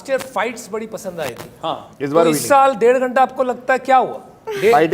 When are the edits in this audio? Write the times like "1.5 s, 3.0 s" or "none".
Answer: none